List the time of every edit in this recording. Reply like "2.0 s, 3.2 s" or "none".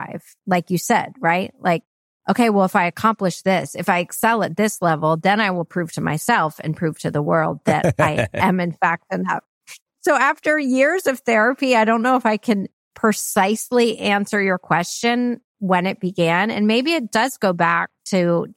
none